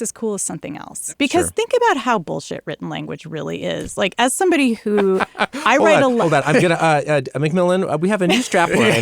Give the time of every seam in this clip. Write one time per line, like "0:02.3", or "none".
0:00.9